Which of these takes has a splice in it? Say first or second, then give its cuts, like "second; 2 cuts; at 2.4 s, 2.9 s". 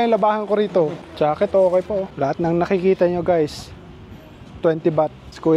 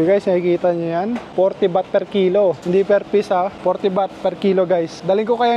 first; 2 cuts; at 1.0 s, 2.1 s